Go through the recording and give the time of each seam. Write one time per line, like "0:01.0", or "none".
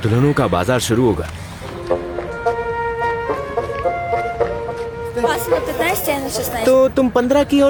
none